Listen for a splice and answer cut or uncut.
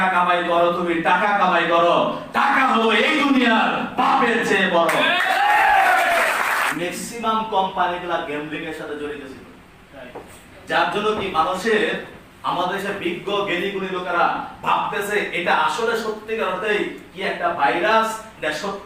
cut